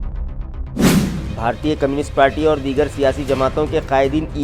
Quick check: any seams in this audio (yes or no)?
no